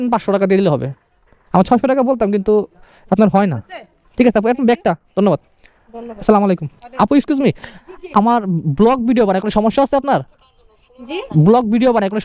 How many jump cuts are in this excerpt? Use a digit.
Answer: 0